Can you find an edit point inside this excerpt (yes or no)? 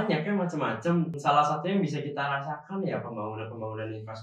yes